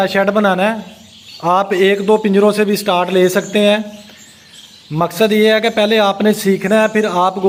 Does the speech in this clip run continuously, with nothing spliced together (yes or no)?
yes